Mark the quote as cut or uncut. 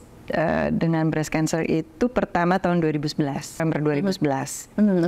cut